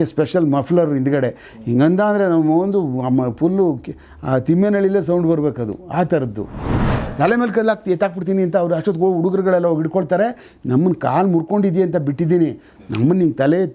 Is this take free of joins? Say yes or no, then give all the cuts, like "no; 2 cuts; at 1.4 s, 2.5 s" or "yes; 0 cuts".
no; 1 cut; at 6.7 s